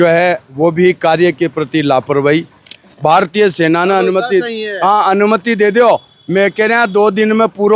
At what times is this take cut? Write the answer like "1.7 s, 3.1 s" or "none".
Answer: 2.8 s